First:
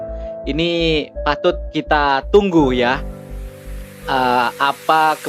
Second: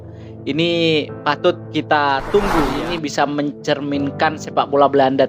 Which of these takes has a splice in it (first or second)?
second